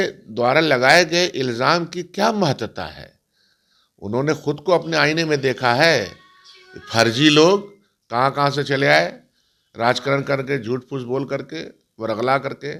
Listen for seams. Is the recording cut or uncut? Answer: uncut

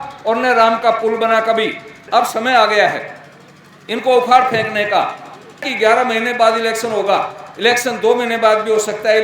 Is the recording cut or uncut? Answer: cut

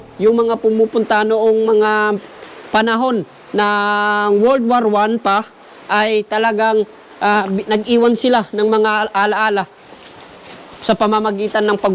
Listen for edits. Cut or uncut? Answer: uncut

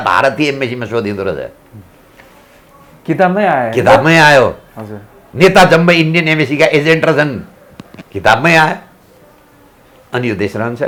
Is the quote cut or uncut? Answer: uncut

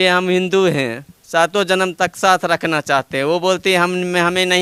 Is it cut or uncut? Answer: uncut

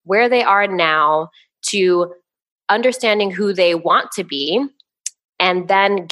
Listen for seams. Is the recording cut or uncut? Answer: uncut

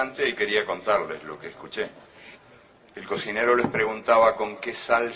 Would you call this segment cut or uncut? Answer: uncut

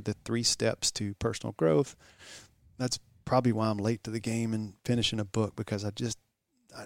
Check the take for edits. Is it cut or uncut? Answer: uncut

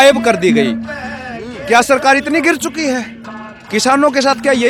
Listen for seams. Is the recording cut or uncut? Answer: uncut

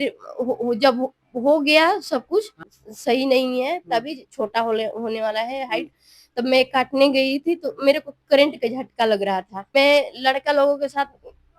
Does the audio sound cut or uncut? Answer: cut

